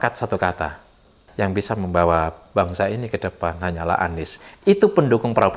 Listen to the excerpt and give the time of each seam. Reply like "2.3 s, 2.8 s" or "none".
1.2 s